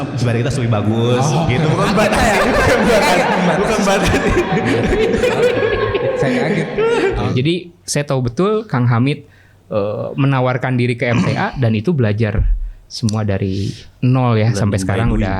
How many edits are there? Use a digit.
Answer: 1